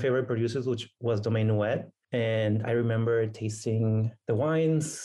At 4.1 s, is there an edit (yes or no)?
yes